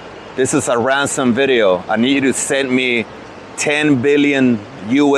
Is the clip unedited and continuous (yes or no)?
yes